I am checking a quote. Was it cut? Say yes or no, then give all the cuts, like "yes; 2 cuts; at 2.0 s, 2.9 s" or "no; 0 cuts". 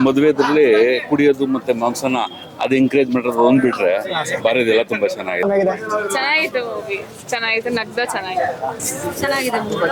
yes; 2 cuts; at 5.4 s, 8.8 s